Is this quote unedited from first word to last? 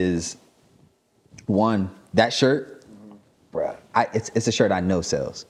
yes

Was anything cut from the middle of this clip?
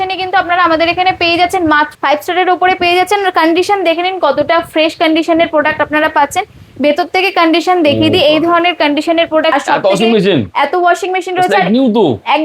yes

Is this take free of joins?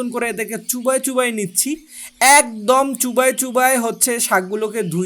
yes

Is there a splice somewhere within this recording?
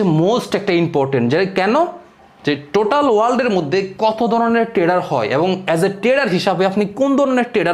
no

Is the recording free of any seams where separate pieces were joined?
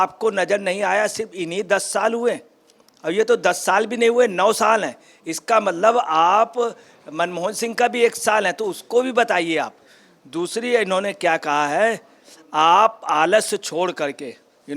yes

